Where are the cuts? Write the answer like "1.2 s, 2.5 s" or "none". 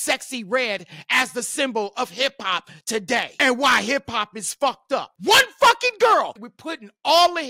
3.3 s, 5.1 s, 6.4 s